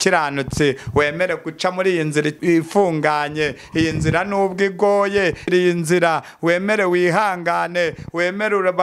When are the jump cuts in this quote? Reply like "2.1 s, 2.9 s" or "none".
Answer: 2.4 s, 5.5 s